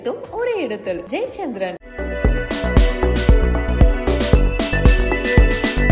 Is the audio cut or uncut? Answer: uncut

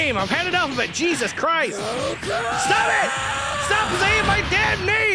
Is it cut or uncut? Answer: uncut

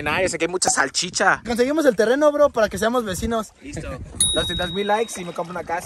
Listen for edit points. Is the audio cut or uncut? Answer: cut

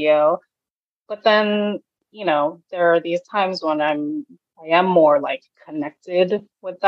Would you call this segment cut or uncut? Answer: cut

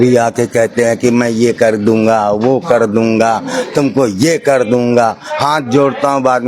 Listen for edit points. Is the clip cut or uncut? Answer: uncut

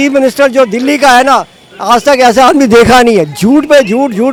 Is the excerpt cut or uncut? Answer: uncut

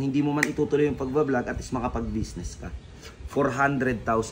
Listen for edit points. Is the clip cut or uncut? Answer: uncut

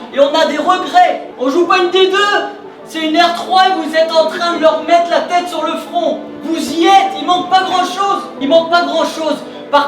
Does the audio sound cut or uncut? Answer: cut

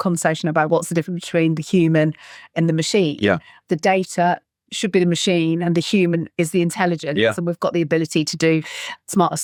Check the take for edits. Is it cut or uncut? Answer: uncut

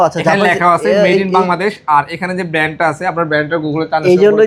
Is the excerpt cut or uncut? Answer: uncut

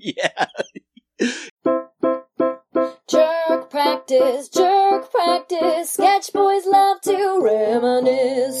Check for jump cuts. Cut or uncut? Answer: cut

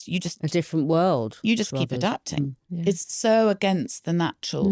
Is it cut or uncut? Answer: cut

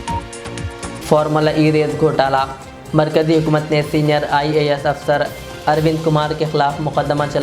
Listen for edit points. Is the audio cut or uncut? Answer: cut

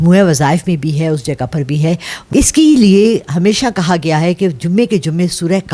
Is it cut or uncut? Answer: cut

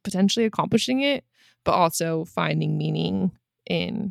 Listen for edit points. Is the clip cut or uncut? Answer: uncut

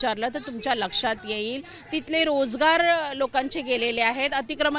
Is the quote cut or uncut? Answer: uncut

